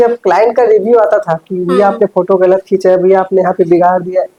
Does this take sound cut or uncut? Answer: uncut